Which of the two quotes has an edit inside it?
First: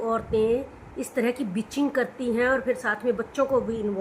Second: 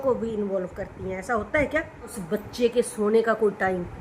second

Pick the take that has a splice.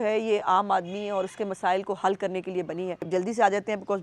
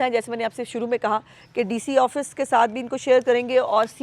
first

